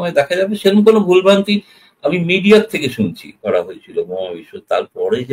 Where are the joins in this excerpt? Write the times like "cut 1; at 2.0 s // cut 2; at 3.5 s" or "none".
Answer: cut 1; at 3.4 s